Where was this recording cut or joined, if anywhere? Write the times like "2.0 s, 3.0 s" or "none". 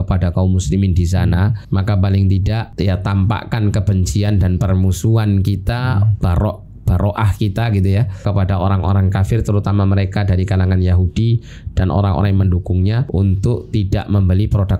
1.6 s, 2.7 s, 8.2 s, 13.0 s